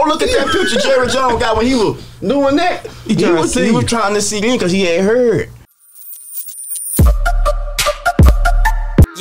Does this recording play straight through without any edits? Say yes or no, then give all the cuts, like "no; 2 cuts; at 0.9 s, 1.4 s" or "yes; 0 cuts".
no; 1 cut; at 5.6 s